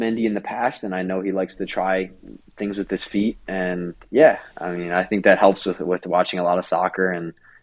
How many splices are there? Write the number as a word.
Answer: zero